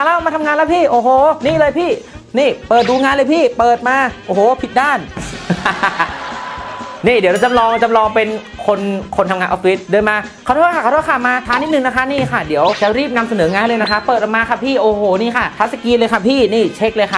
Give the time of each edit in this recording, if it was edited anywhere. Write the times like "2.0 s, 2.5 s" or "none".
5.2 s